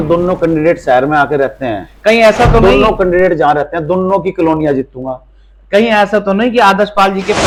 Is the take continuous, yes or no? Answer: yes